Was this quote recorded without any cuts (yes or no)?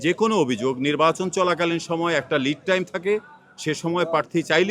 yes